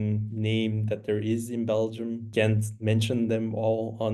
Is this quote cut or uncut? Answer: cut